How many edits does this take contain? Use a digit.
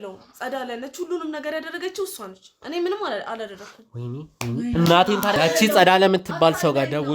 1